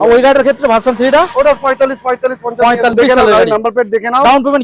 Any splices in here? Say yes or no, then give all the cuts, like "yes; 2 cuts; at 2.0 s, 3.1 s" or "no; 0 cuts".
yes; 1 cut; at 2.9 s